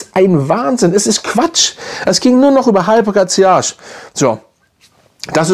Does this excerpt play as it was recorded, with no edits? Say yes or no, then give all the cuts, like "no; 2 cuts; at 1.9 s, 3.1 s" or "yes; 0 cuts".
yes; 0 cuts